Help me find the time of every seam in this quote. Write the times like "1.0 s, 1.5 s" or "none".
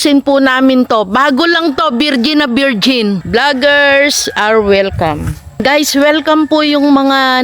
3.2 s, 5.6 s